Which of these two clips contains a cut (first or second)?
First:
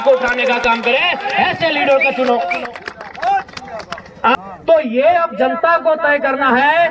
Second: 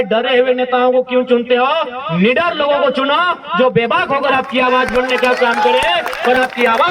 first